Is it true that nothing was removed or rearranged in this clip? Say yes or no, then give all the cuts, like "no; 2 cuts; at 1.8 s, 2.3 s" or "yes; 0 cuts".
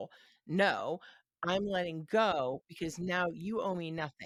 yes; 0 cuts